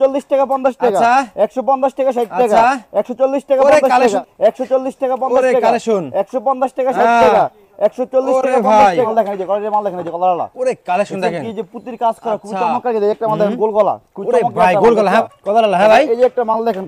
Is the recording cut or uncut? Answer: cut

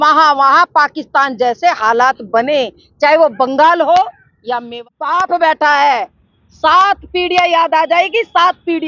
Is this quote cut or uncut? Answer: cut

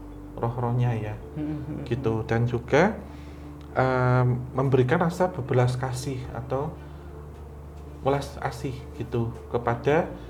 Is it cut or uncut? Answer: uncut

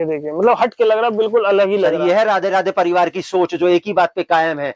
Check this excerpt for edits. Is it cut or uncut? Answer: uncut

